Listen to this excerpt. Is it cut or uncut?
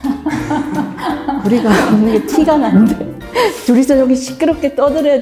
uncut